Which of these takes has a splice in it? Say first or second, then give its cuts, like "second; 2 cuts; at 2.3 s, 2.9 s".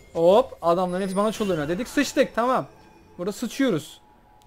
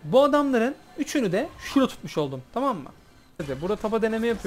second; 1 cut; at 3.4 s